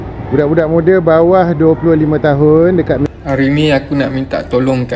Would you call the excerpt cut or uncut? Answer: cut